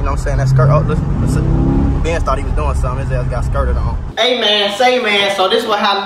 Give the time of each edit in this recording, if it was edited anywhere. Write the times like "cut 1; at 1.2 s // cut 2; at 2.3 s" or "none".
cut 1; at 4.0 s